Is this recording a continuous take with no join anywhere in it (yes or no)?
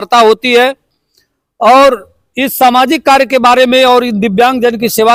yes